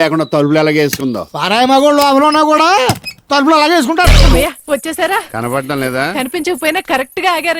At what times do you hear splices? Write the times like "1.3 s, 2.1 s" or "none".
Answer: 4.2 s